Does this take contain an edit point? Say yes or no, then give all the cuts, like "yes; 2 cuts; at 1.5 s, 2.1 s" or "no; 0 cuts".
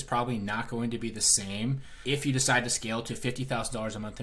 yes; 1 cut; at 2.0 s